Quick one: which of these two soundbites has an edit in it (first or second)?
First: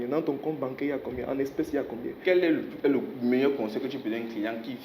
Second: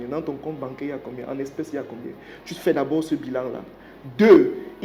first